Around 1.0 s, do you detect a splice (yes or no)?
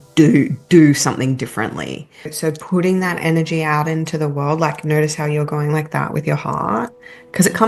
no